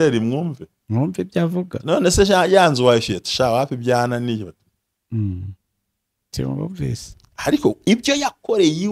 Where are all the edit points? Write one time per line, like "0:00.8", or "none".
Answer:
none